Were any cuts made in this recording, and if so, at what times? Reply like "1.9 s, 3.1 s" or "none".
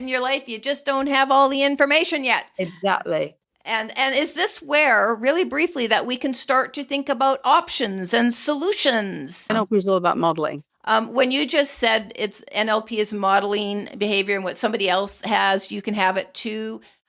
9.5 s, 10.7 s